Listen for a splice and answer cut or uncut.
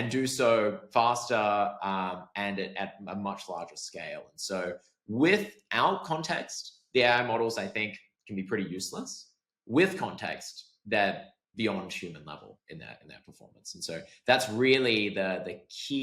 uncut